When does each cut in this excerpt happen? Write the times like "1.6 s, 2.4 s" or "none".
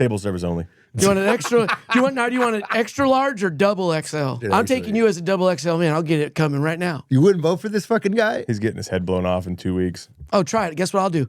4.4 s, 7.0 s